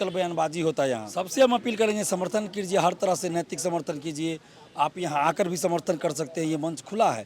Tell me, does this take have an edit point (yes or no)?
yes